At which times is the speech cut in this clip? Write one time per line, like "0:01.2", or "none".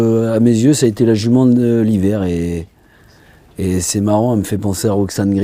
none